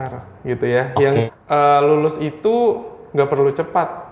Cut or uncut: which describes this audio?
cut